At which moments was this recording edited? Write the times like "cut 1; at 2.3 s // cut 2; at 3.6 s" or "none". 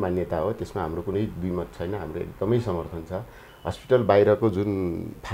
cut 1; at 3.5 s